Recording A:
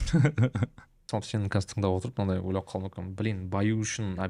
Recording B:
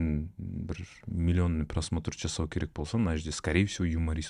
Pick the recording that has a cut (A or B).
A